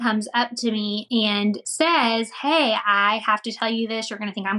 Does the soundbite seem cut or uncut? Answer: cut